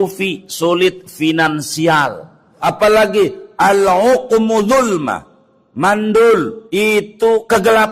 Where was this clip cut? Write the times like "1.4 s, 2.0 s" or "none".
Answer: 2.5 s, 6.6 s